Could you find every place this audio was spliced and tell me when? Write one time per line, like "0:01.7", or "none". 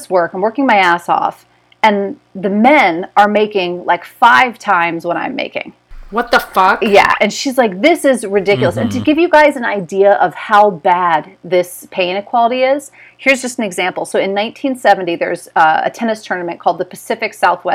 none